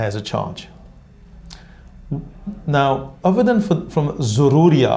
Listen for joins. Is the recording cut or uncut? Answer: uncut